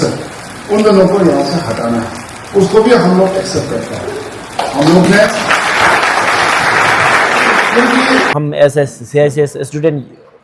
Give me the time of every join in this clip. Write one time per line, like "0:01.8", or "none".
0:08.3